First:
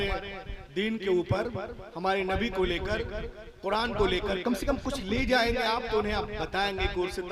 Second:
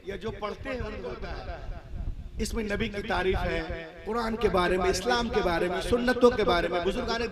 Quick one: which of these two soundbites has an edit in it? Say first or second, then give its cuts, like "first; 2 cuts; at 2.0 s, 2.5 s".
second; 1 cut; at 1.3 s